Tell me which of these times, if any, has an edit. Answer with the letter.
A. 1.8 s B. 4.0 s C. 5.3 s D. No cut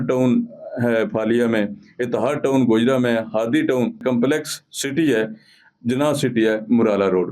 B